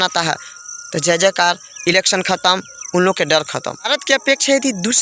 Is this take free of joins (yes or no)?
no